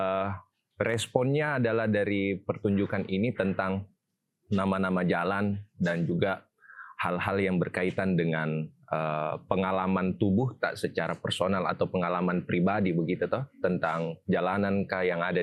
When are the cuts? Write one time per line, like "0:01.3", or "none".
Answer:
none

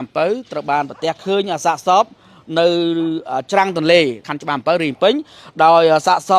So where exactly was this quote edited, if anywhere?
0:04.3

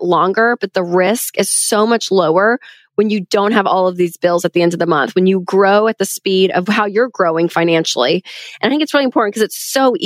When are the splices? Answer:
0:06.7

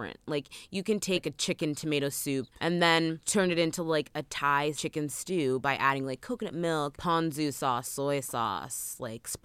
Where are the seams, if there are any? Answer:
0:01.2
0:02.5
0:03.2
0:04.8
0:07.0

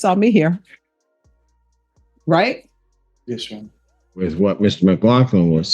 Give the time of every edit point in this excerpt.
0:04.2

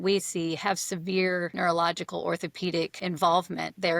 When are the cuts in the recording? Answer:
0:01.5
0:03.0

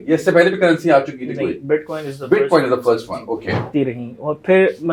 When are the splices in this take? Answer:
0:03.7

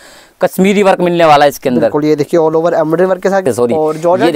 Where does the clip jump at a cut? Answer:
0:03.4

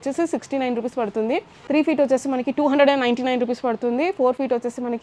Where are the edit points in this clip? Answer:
0:01.5

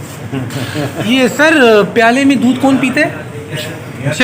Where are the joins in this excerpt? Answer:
0:01.0

